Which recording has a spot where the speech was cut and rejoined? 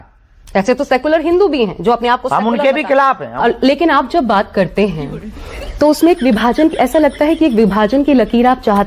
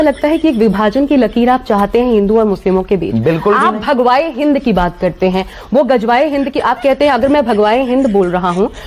first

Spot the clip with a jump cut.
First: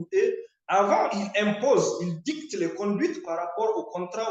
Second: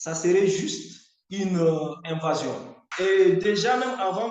second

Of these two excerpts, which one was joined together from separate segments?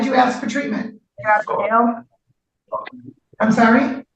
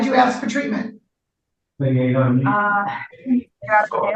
first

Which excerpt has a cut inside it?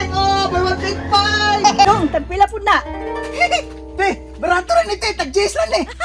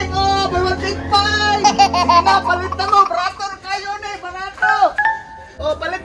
first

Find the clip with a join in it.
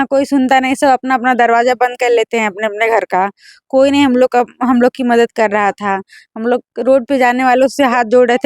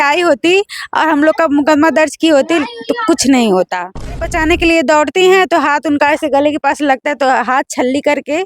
second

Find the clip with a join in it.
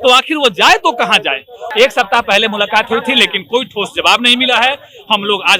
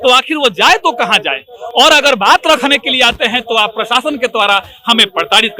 first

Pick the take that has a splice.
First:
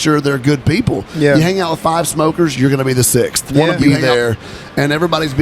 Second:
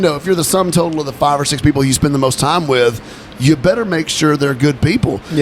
first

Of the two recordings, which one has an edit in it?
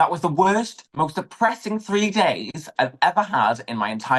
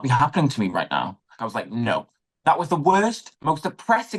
second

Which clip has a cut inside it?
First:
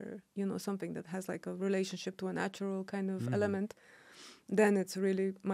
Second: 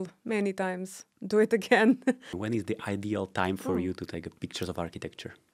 second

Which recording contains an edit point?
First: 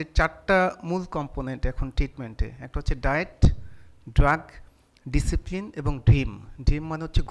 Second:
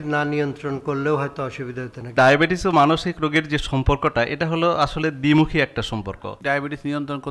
second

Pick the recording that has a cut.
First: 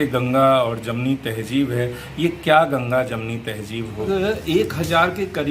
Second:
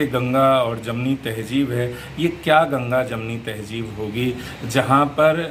first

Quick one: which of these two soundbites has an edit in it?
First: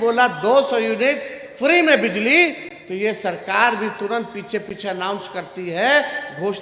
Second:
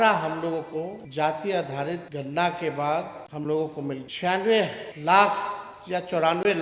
second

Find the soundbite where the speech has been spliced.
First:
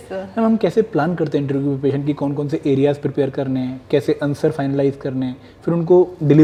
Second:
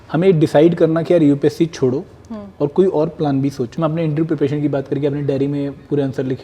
second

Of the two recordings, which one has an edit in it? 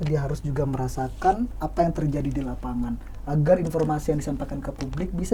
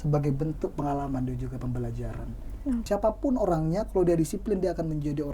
second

